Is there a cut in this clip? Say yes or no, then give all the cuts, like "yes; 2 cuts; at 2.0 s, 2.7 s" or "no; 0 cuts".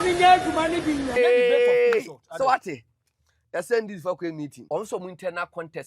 yes; 2 cuts; at 1.1 s, 4.6 s